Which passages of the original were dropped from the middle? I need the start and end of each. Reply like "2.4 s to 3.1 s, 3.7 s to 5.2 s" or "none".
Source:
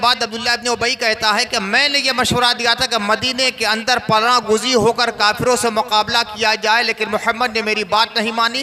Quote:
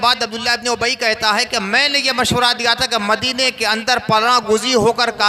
none